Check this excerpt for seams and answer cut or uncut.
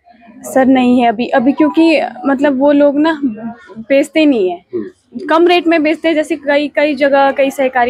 uncut